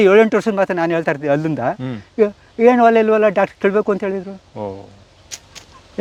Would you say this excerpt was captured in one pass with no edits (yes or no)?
yes